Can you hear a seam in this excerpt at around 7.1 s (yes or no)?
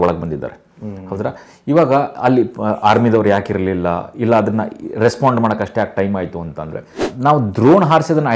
yes